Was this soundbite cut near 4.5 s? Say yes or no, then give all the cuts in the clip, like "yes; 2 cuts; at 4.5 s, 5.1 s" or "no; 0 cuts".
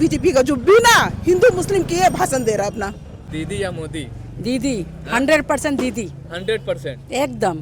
no; 1 cut; at 3.2 s